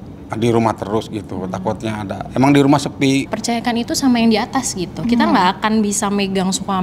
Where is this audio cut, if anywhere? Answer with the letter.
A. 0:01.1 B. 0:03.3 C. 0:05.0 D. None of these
B